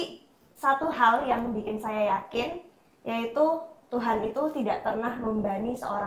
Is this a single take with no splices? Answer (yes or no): yes